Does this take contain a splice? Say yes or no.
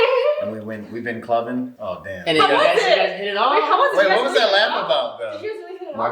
no